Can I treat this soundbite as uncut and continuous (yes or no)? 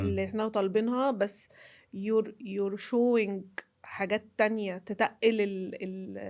yes